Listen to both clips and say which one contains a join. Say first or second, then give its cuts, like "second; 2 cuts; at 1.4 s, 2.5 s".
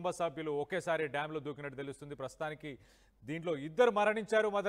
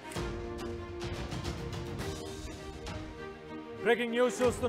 second; 1 cut; at 1.1 s